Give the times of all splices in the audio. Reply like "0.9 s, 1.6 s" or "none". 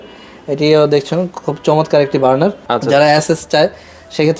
2.6 s